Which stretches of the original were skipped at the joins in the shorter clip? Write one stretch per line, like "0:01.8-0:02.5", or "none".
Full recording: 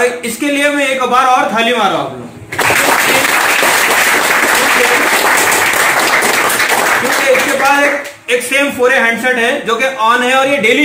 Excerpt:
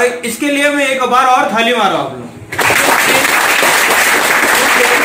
none